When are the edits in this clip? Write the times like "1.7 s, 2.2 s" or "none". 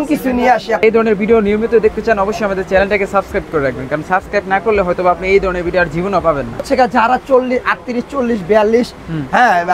0.8 s, 6.7 s